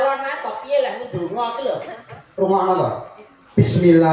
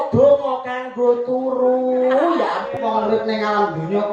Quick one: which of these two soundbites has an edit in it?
second; 1 cut; at 2.6 s

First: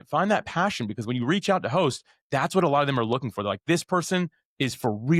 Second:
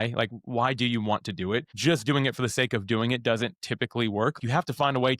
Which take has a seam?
second; 2 cuts; at 1.7 s, 4.3 s

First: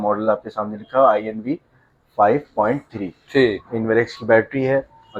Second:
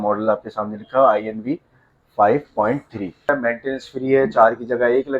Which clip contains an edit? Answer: second; 1 cut; at 3.3 s

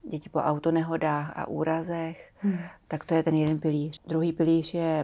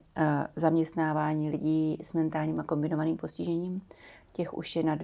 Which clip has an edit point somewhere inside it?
first; 1 cut; at 4.0 s

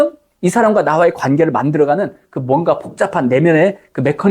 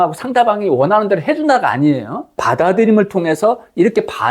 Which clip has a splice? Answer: second; 1 cut; at 2.4 s

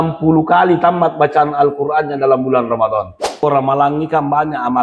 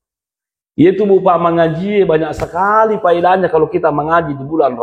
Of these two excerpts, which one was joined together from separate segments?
first; 1 cut; at 3.4 s

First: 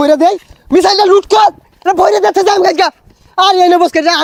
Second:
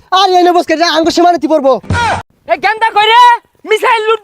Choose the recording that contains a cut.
second; 1 cut; at 2.2 s

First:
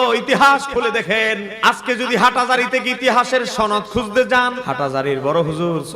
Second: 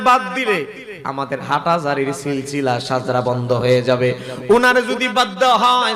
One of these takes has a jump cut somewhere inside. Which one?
first; 2 cuts; at 1.5 s, 4.6 s

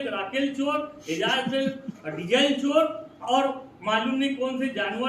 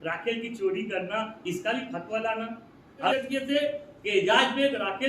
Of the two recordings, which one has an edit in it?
second; 1 cut; at 3.1 s

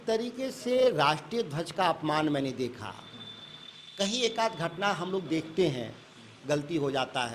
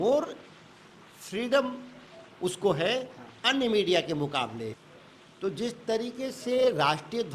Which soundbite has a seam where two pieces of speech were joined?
second; 1 cut; at 4.8 s

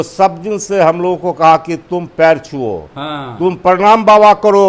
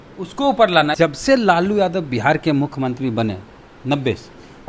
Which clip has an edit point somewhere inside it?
second; 1 cut; at 1.0 s

